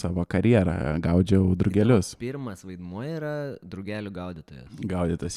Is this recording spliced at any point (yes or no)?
no